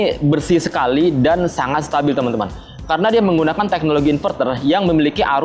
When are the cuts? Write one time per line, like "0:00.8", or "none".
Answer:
none